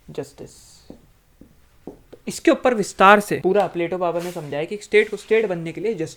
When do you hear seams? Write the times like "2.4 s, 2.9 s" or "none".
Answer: 1.6 s, 3.3 s